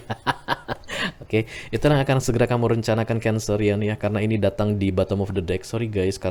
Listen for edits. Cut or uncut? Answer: uncut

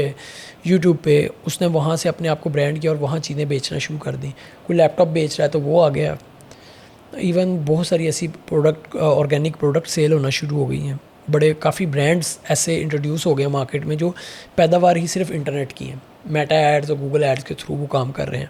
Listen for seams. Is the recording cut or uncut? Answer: uncut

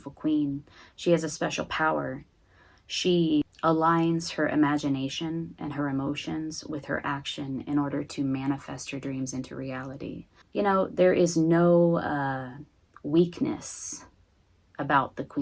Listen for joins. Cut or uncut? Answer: cut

